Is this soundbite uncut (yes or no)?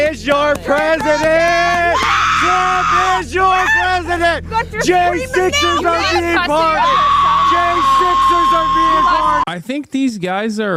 no